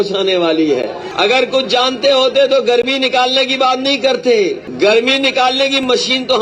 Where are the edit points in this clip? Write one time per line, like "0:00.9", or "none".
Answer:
0:01.0
0:04.7